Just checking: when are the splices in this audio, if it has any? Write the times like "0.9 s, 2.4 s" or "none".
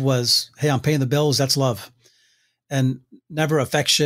none

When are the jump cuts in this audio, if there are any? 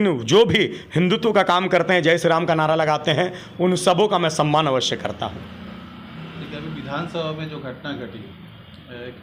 none

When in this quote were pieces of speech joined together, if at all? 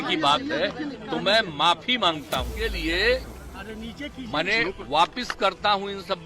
2.6 s

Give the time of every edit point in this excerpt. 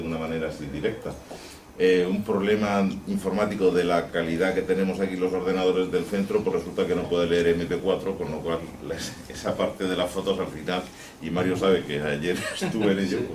7.1 s

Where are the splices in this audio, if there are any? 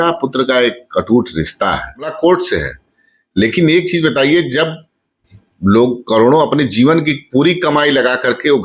2.1 s

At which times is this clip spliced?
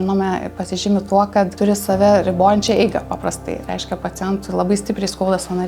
1.5 s

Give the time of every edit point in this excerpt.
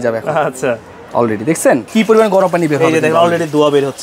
1.9 s

